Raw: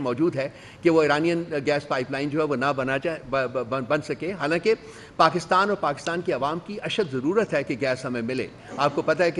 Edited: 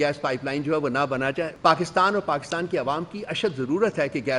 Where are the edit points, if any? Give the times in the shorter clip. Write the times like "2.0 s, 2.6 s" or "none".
1.5 s